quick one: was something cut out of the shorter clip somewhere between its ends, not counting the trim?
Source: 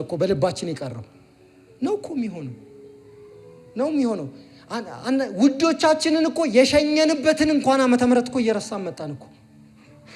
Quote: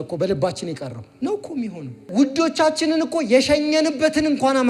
yes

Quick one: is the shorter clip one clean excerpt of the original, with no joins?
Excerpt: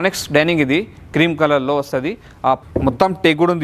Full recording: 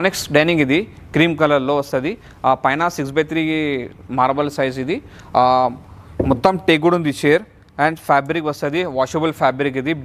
no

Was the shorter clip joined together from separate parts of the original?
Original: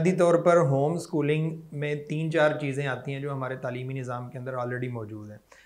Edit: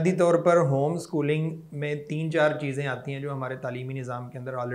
no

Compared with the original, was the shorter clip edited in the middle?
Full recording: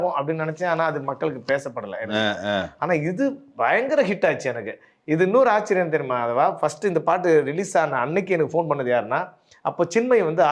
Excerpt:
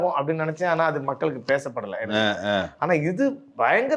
no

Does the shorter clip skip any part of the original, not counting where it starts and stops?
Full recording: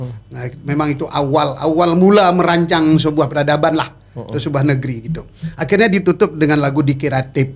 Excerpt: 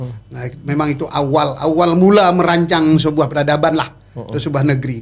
no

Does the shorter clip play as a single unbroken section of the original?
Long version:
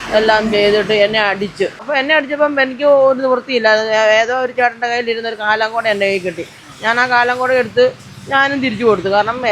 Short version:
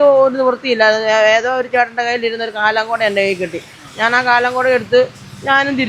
yes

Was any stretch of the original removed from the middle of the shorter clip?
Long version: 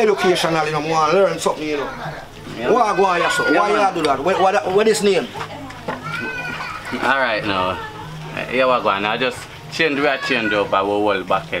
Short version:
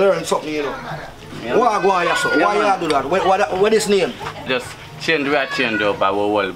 yes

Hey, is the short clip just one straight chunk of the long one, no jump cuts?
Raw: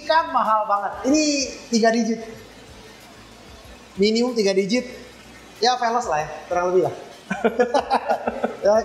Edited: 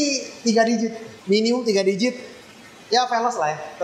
no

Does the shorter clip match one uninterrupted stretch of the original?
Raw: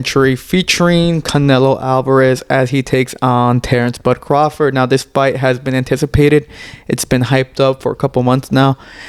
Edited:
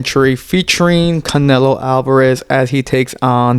yes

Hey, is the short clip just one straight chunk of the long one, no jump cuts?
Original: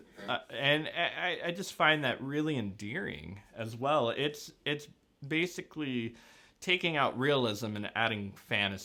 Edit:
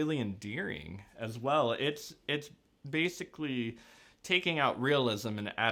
yes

